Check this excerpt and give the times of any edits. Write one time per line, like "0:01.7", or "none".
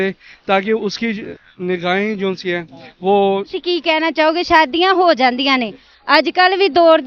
0:03.5